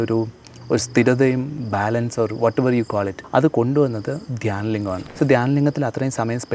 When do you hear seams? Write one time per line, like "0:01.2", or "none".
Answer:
0:01.6
0:03.2
0:05.1